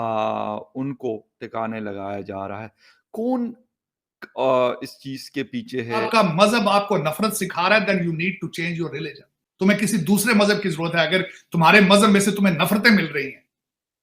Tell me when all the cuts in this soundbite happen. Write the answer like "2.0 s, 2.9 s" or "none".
6.1 s

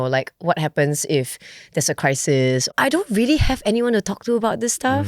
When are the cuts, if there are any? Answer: 2.7 s

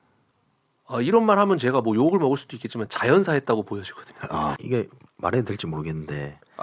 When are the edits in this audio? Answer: 4.6 s

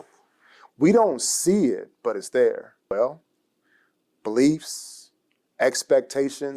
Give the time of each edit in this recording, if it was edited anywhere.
2.8 s

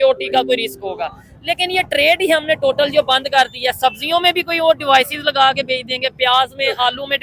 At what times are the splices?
none

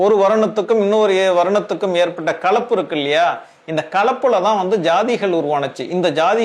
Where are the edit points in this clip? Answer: none

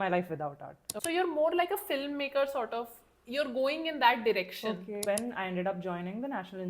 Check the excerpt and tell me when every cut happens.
0.9 s, 5.0 s

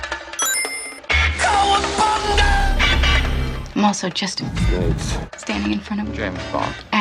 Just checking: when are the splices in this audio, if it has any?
none

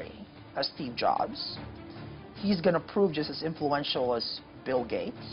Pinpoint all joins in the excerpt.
none

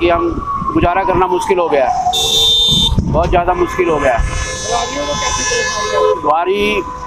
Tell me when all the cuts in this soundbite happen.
none

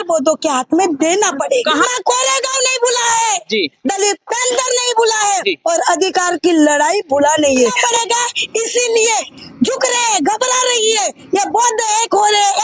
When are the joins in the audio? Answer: 1.9 s, 7.8 s

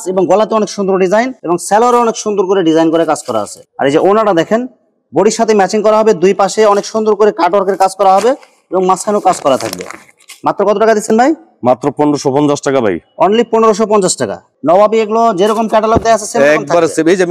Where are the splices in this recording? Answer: none

